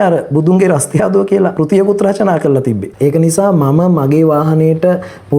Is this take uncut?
no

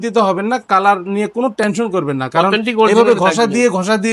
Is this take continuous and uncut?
yes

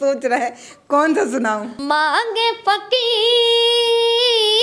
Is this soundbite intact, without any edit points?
no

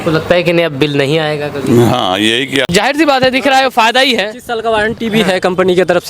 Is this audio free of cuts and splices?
no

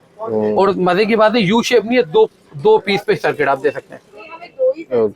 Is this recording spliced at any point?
no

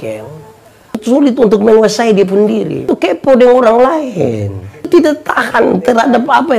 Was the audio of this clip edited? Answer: yes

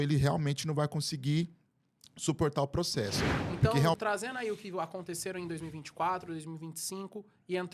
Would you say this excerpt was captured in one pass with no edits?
no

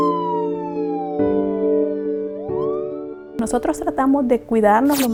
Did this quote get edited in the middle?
no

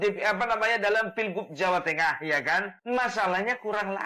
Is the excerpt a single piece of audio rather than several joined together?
no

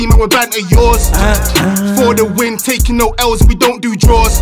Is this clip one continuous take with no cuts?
yes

